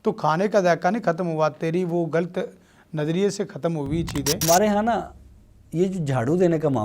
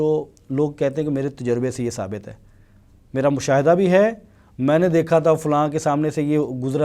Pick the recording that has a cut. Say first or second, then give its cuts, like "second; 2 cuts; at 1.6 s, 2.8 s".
first; 1 cut; at 4.4 s